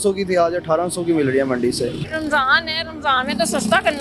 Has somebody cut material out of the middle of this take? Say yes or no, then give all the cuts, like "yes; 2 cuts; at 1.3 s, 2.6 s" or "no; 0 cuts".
yes; 1 cut; at 2.0 s